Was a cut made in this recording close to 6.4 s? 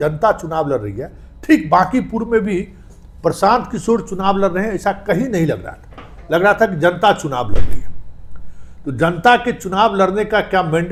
no; 0 cuts

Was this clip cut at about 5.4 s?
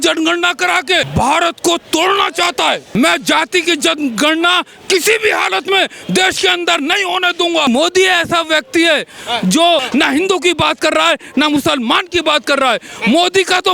no; 4 cuts; at 1.1 s, 2.8 s, 7.7 s, 9.9 s

